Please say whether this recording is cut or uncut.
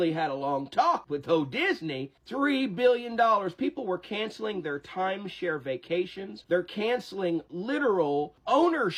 uncut